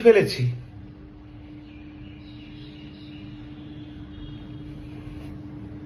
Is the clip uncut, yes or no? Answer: yes